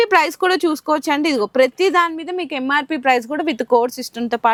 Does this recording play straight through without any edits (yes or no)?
yes